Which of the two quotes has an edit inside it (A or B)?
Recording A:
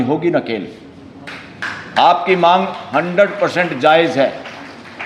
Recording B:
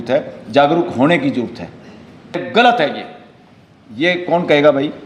B